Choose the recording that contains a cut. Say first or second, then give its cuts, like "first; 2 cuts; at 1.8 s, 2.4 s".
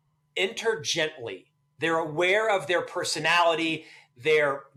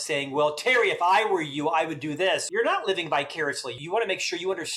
second; 2 cuts; at 2.4 s, 3.8 s